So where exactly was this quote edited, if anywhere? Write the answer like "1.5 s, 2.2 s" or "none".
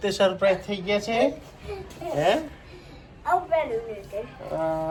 none